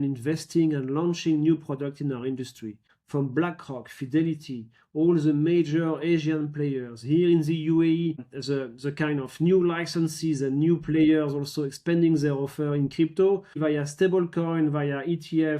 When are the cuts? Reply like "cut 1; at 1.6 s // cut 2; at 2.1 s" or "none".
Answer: cut 1; at 13.6 s